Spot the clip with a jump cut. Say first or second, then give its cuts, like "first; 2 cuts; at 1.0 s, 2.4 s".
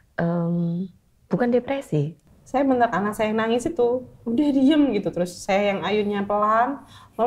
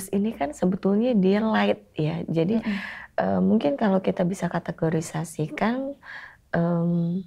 first; 1 cut; at 2.2 s